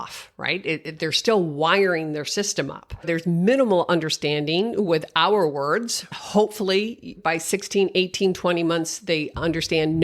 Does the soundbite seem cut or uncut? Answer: cut